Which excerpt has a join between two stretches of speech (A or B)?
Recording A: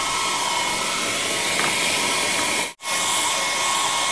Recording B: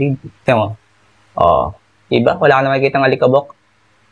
A